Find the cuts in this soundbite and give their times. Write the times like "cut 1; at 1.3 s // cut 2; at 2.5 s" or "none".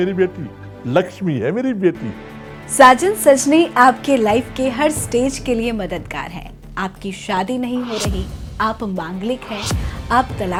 none